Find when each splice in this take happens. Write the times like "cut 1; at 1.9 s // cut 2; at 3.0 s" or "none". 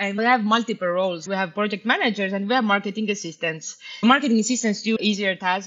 cut 1; at 1.2 s // cut 2; at 4.0 s // cut 3; at 5.0 s